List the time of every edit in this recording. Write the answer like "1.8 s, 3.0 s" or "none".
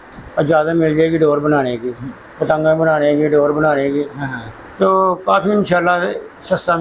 none